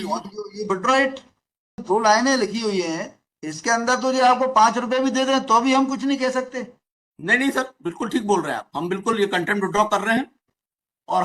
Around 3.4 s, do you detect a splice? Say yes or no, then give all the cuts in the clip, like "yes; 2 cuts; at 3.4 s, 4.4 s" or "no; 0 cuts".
no; 1 cut; at 1.8 s